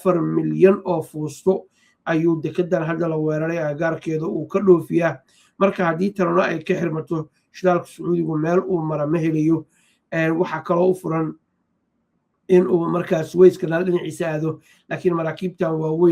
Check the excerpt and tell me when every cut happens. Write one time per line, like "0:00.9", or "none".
none